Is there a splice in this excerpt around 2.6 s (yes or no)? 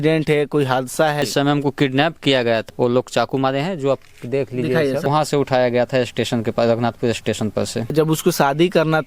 yes